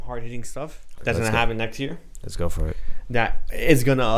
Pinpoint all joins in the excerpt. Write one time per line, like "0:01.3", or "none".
0:01.0